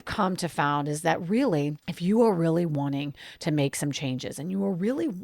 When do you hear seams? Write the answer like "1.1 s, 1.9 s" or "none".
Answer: 1.9 s